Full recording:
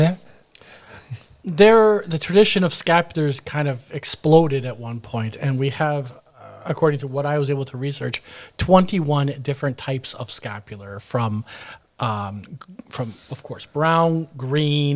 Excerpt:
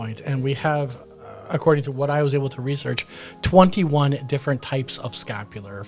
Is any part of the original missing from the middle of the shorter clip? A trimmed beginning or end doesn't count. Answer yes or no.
no